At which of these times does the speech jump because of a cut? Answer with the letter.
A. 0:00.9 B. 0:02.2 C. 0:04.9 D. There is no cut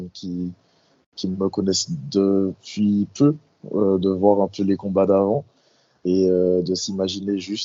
D